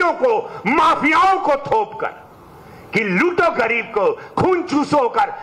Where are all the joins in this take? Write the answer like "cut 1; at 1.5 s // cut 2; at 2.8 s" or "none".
none